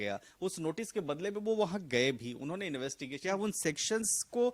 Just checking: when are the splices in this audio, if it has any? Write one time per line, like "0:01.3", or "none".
0:03.1